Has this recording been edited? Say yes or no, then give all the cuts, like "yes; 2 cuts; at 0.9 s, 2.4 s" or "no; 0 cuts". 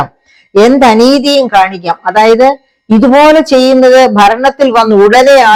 no; 0 cuts